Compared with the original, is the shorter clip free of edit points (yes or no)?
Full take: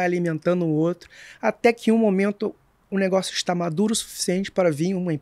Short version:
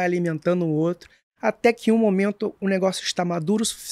no